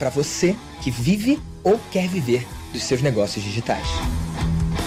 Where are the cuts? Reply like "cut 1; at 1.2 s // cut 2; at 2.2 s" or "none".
none

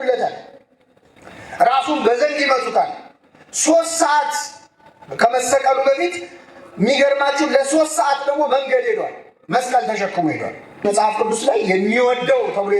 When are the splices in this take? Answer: cut 1; at 10.8 s

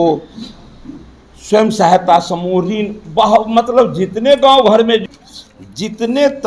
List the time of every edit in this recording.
cut 1; at 5.0 s

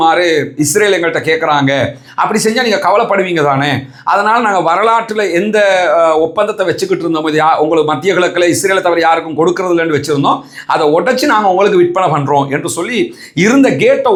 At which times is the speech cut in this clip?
none

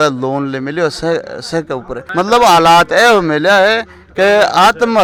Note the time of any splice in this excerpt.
none

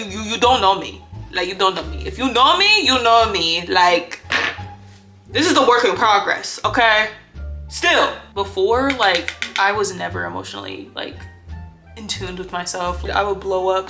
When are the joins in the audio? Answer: cut 1; at 8.2 s // cut 2; at 13.1 s

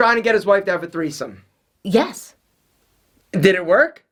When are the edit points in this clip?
none

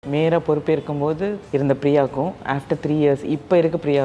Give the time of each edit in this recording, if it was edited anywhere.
cut 1; at 1.4 s

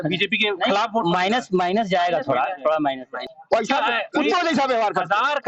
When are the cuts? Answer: cut 1; at 3.3 s

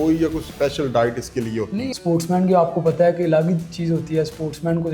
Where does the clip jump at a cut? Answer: cut 1; at 1.9 s

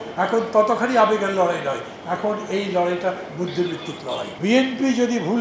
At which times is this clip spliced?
cut 1; at 4.3 s

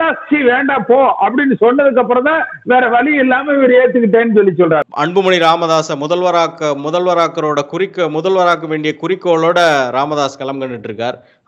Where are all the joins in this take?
cut 1; at 4.8 s

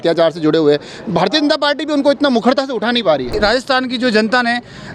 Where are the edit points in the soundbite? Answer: cut 1; at 3.3 s

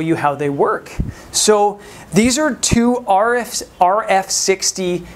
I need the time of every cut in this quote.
cut 1; at 2.0 s

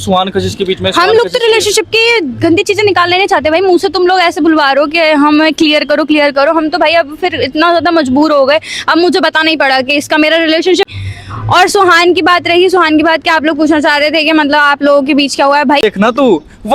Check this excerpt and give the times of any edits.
cut 1; at 10.9 s // cut 2; at 15.8 s

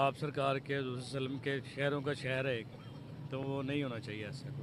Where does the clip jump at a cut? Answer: none

